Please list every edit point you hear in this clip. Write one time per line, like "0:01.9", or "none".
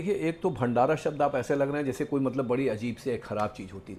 none